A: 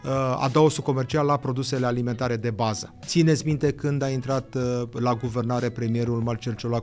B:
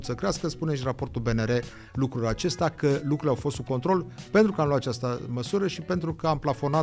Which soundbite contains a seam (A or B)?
A